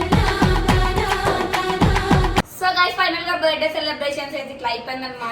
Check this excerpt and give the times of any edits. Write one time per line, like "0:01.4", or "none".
0:02.5